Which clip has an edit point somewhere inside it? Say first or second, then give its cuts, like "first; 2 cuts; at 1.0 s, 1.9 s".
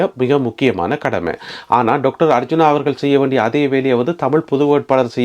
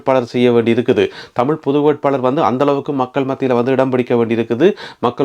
first; 1 cut; at 1.5 s